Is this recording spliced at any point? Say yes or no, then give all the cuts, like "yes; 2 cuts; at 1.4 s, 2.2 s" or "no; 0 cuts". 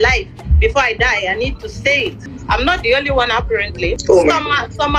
yes; 2 cuts; at 2.3 s, 4.0 s